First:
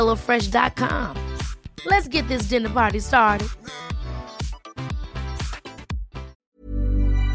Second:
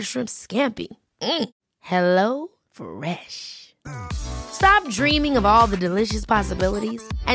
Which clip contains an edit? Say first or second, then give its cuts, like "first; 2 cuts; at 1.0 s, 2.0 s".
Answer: first; 1 cut; at 6.4 s